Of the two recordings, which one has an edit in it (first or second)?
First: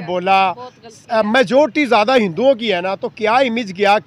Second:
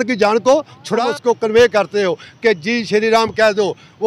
second